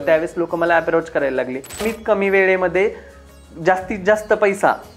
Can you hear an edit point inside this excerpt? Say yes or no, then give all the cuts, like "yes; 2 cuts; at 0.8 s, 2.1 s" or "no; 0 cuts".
yes; 1 cut; at 1.9 s